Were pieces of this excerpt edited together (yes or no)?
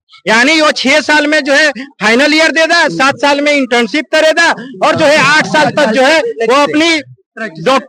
no